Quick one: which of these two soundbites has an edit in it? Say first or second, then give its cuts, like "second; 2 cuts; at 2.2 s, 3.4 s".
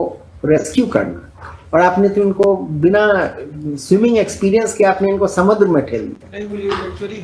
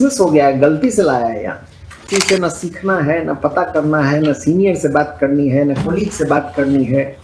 second; 1 cut; at 2.1 s